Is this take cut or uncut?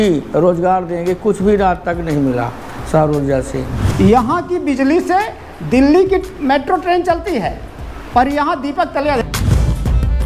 cut